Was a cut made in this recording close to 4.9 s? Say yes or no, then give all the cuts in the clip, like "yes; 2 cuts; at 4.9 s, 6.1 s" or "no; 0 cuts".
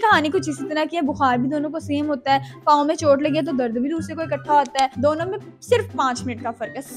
yes; 1 cut; at 4.9 s